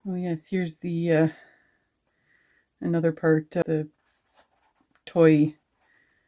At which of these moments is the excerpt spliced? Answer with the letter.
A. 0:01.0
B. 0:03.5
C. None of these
B